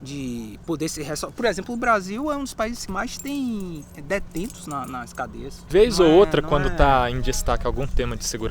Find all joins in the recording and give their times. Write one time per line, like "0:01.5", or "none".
0:02.8
0:05.6